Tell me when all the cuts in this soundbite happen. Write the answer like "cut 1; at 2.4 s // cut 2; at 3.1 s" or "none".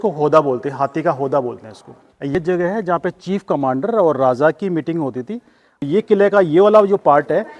cut 1; at 2.4 s // cut 2; at 5.8 s